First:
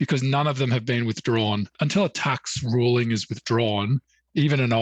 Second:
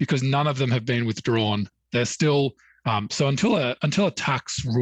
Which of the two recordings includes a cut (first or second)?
first